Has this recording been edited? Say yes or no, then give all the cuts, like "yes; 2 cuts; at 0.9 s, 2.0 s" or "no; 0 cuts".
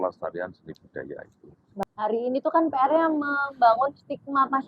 yes; 1 cut; at 1.7 s